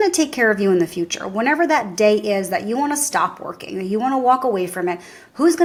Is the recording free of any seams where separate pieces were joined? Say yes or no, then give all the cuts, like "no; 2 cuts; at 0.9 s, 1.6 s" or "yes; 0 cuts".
yes; 0 cuts